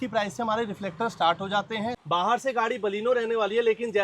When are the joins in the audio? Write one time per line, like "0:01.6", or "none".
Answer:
0:02.0